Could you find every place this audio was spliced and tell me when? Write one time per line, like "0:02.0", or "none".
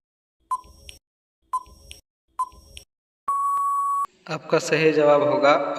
0:04.2